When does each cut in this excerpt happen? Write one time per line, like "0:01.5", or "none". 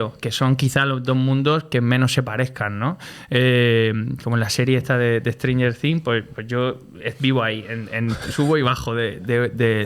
none